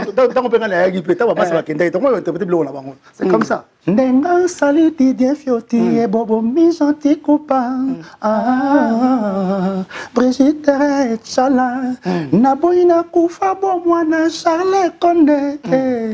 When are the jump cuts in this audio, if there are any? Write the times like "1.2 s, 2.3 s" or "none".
3.7 s